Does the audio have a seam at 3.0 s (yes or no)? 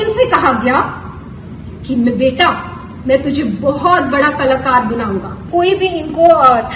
no